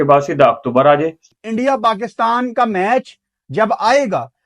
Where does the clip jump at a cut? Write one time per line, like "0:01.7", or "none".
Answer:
0:01.2